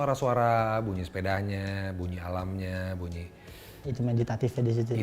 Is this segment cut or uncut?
uncut